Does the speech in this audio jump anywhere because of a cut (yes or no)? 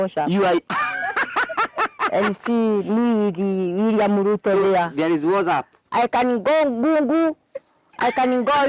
yes